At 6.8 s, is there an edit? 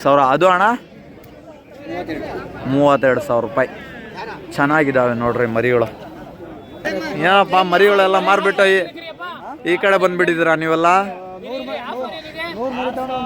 yes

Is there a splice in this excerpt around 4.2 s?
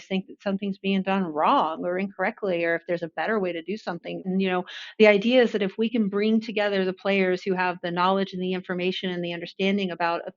yes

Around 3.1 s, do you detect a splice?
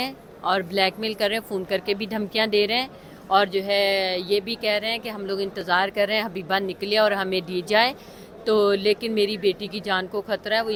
no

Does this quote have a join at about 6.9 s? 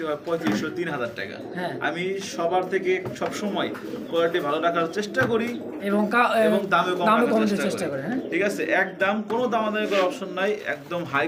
no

